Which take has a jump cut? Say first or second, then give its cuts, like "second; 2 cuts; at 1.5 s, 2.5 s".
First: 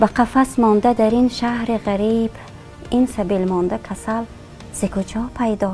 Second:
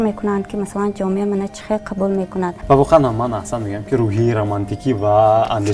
second; 1 cut; at 2.6 s